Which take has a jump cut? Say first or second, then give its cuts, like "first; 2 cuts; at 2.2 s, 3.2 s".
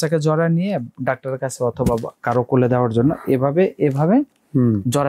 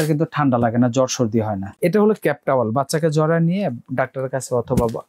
second; 1 cut; at 1.6 s